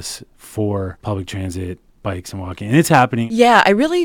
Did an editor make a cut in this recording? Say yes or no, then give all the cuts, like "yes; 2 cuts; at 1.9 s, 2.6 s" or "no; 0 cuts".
yes; 2 cuts; at 1.0 s, 3.3 s